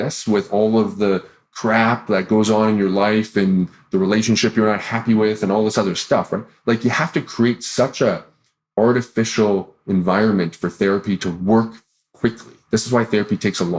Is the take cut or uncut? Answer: uncut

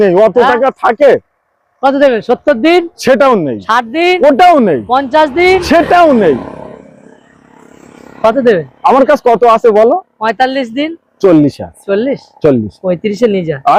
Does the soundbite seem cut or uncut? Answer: uncut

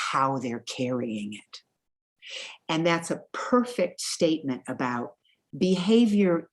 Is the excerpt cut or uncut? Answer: uncut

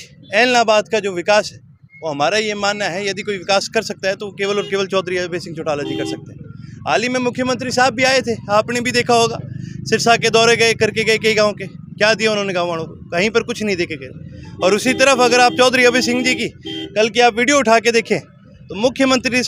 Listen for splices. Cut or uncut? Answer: uncut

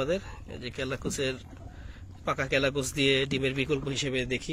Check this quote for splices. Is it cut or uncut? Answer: uncut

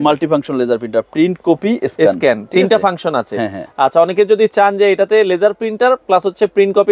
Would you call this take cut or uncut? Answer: uncut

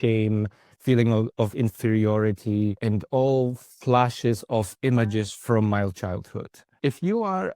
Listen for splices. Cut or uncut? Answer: cut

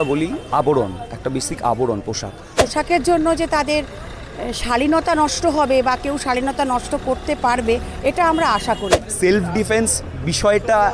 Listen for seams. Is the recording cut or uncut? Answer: cut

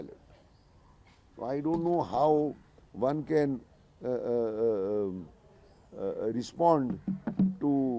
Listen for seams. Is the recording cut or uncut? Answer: uncut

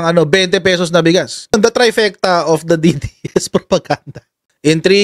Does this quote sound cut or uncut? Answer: cut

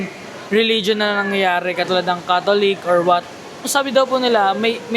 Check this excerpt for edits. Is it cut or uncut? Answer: cut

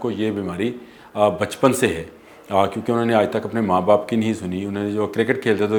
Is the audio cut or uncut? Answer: uncut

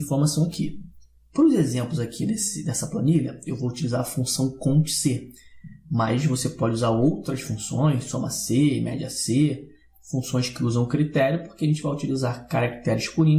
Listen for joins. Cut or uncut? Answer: cut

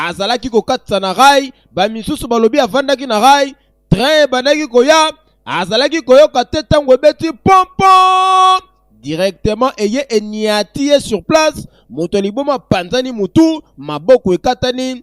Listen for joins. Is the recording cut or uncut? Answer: uncut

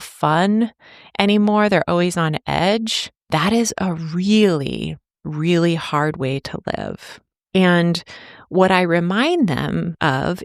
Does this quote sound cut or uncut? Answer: uncut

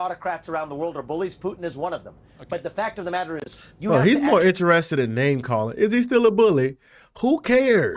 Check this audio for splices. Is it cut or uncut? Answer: uncut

